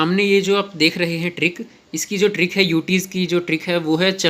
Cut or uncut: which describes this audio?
uncut